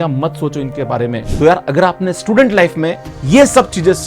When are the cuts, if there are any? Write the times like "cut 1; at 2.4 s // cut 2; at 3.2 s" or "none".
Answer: cut 1; at 1.2 s